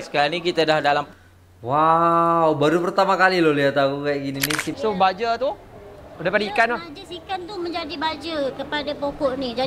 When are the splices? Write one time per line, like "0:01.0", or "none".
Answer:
0:04.6

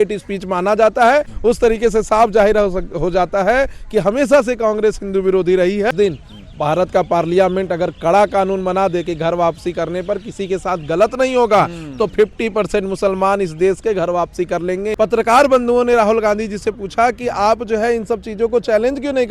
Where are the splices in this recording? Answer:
0:01.3
0:05.9
0:14.9

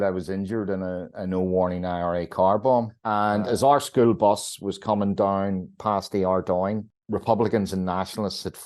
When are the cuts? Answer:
0:03.0
0:06.9

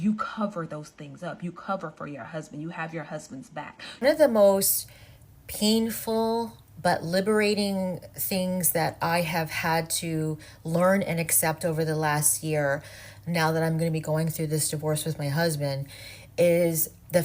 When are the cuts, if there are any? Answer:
0:03.8

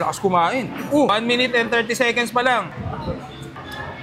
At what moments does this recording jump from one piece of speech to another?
0:01.1

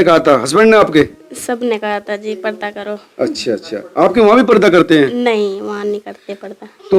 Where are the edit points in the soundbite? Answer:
none

